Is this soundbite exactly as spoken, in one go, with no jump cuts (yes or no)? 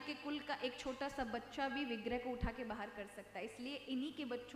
yes